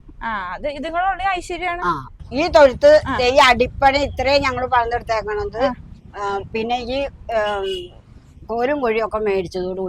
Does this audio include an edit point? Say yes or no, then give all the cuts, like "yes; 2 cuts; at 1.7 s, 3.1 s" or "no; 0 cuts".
yes; 1 cut; at 2.2 s